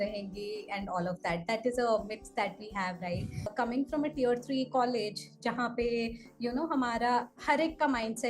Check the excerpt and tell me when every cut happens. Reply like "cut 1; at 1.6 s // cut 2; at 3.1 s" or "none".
cut 1; at 3.5 s